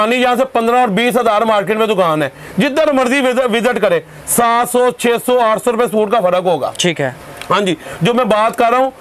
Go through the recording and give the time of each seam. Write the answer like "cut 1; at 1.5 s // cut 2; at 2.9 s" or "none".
none

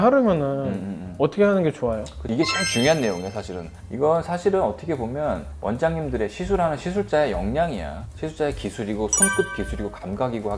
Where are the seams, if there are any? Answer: cut 1; at 2.2 s

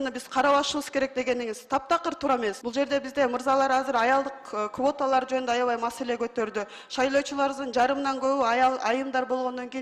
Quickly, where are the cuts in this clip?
cut 1; at 2.6 s

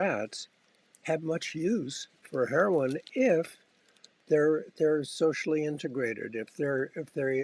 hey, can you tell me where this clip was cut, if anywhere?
none

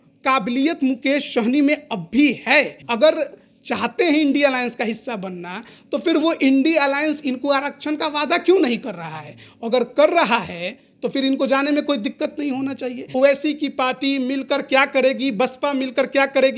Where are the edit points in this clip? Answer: cut 1; at 2.8 s // cut 2; at 13.1 s

